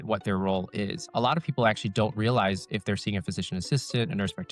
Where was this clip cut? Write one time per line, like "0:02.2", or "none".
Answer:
0:01.0